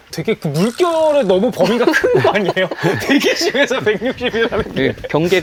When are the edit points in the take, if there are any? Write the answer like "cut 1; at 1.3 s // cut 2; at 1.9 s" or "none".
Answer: none